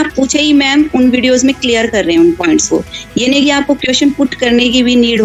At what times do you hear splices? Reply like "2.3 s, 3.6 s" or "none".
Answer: none